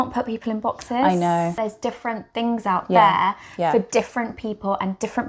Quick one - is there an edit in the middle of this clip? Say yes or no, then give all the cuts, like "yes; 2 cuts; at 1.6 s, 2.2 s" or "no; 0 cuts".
yes; 1 cut; at 1.6 s